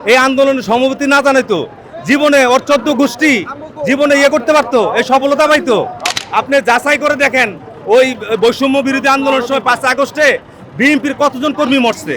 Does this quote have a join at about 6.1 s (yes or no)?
yes